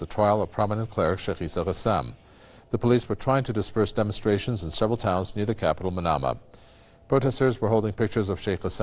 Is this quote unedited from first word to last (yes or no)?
yes